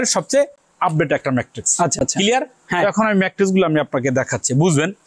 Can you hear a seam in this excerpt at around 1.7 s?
no; 0 cuts

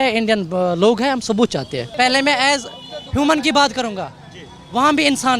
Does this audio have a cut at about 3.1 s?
no; 1 cut; at 1.8 s

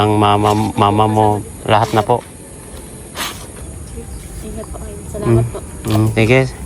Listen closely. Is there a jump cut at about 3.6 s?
yes; 1 cut; at 3.6 s

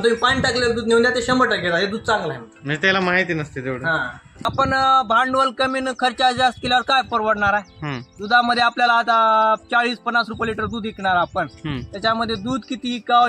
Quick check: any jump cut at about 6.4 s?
no; 1 cut; at 4.4 s

